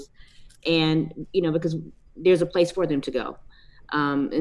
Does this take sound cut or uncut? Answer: uncut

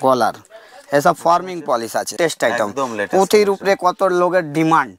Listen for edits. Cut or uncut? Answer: cut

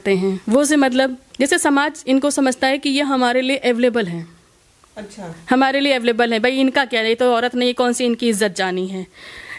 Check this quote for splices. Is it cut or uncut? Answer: cut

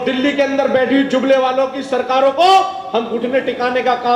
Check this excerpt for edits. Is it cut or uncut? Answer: uncut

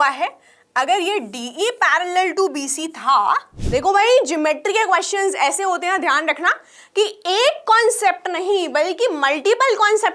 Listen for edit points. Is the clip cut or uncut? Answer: cut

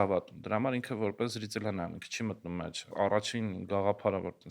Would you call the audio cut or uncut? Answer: cut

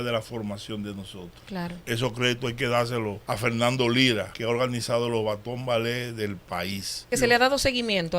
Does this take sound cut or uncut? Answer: cut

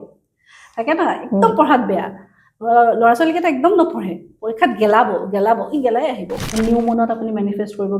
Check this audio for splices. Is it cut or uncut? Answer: cut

